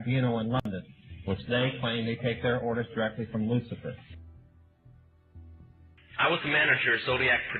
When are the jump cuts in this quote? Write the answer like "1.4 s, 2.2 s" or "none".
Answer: 3.1 s